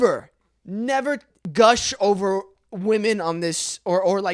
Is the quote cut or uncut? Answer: cut